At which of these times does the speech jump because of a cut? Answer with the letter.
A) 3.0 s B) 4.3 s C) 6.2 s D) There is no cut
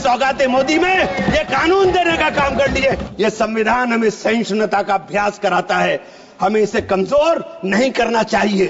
A